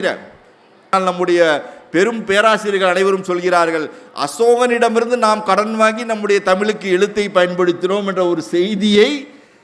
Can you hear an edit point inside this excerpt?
yes; 1 cut; at 0.9 s

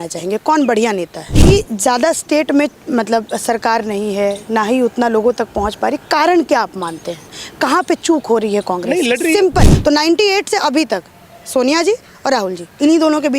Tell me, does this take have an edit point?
yes; 2 cuts; at 1.3 s, 9.7 s

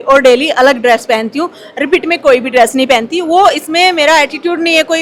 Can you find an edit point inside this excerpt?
no; 0 cuts

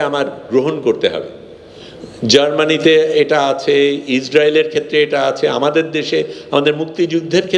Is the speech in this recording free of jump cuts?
yes; 0 cuts

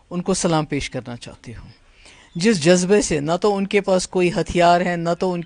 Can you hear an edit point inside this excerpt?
no; 0 cuts

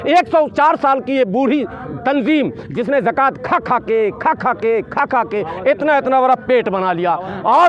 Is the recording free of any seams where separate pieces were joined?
yes; 0 cuts

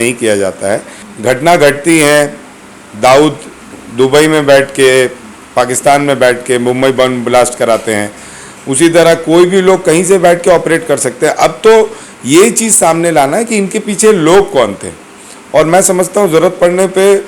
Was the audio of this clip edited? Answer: no; 0 cuts

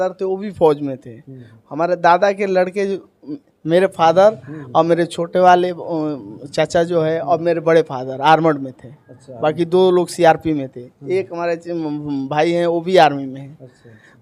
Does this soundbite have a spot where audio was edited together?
no; 0 cuts

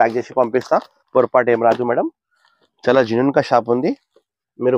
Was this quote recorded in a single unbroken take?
yes; 0 cuts

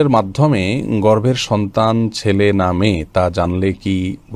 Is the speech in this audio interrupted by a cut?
no; 0 cuts

